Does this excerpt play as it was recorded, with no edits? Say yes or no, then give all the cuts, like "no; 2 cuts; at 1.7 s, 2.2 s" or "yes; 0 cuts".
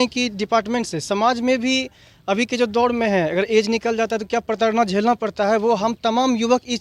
yes; 0 cuts